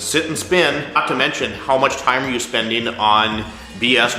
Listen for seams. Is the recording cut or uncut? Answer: cut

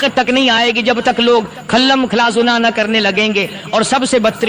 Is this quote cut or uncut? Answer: uncut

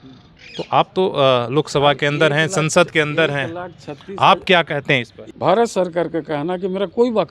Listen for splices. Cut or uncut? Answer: cut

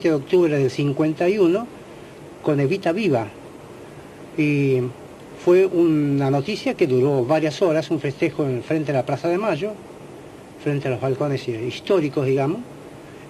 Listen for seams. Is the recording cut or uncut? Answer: cut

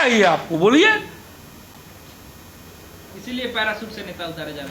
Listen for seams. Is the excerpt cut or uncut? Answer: uncut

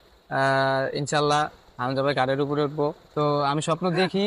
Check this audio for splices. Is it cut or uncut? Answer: cut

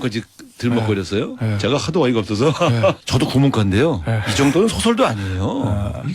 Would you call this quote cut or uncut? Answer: cut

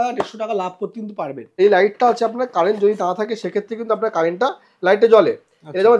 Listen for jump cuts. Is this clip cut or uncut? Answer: cut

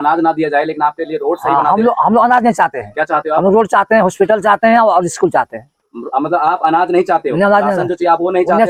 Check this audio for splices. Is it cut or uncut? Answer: uncut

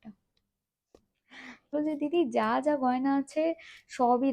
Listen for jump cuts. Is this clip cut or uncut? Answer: cut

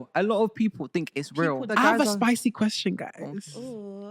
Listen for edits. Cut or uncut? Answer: cut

